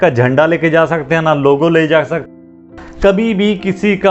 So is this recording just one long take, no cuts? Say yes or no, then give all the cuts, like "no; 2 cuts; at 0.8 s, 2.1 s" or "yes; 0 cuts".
no; 1 cut; at 2.6 s